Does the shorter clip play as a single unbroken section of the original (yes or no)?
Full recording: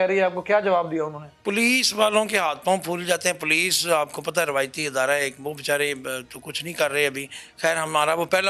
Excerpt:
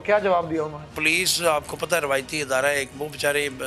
no